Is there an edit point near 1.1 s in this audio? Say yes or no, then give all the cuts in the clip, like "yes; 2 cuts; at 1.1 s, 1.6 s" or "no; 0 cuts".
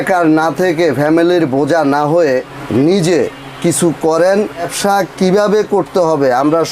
no; 2 cuts; at 2.6 s, 4.7 s